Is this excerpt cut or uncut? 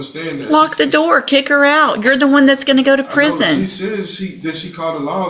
uncut